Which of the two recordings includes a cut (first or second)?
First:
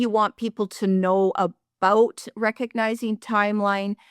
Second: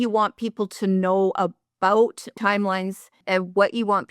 second